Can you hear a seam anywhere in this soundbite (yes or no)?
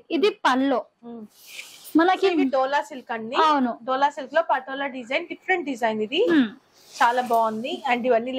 no